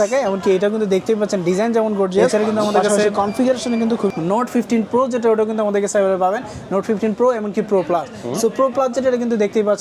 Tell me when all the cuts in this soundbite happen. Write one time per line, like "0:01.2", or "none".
0:04.1